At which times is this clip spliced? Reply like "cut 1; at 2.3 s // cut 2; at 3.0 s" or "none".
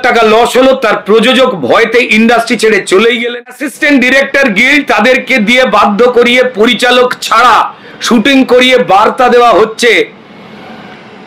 cut 1; at 3.7 s